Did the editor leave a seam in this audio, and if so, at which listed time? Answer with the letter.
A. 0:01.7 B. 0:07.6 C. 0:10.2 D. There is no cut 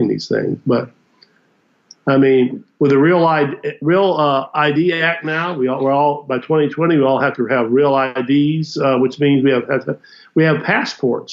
D